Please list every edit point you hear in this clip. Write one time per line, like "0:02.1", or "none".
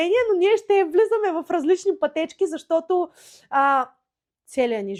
none